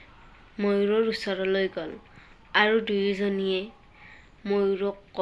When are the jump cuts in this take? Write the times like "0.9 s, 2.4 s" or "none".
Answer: none